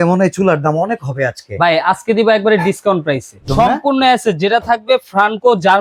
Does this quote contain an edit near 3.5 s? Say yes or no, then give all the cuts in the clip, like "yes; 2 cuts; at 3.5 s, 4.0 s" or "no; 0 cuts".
yes; 1 cut; at 3.5 s